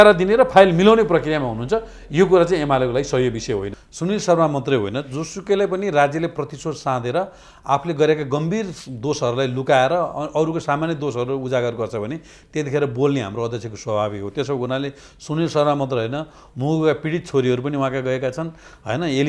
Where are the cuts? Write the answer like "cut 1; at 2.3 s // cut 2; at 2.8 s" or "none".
cut 1; at 3.8 s